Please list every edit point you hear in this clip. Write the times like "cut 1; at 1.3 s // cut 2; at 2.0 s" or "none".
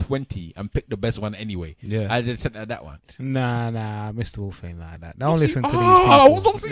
cut 1; at 2.9 s